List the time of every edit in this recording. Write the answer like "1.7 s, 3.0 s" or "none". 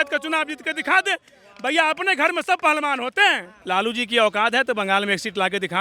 3.5 s